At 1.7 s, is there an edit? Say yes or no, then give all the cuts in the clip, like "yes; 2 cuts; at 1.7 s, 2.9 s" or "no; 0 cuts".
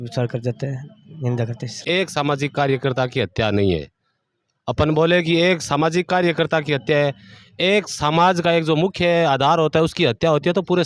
yes; 1 cut; at 1.7 s